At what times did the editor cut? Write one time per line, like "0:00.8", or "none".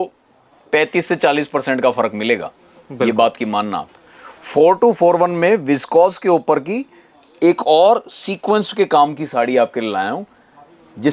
none